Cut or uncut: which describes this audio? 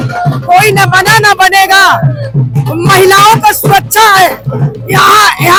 uncut